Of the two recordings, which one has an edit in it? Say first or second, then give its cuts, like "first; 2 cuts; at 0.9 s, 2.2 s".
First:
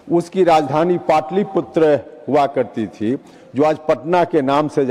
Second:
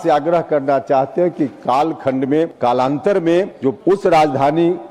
second; 2 cuts; at 2.5 s, 3.6 s